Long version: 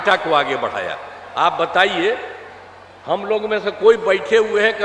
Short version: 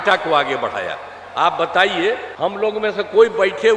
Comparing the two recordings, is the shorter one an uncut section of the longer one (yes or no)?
no